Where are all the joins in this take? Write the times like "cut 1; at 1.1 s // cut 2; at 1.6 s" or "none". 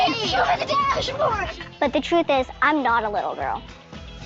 cut 1; at 2.9 s